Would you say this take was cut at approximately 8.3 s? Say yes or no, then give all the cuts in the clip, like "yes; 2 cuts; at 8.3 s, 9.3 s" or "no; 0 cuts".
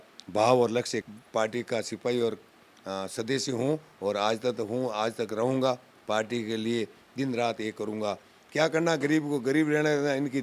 yes; 2 cuts; at 1.1 s, 8.3 s